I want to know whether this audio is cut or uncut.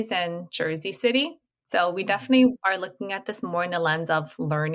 uncut